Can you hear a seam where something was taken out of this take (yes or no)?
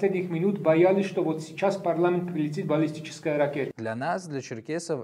yes